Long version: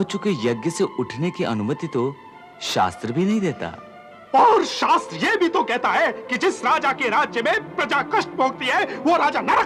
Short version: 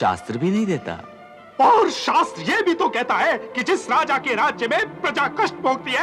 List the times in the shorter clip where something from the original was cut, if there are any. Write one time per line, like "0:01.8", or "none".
none